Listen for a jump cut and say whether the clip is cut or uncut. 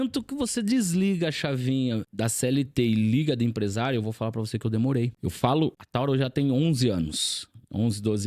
cut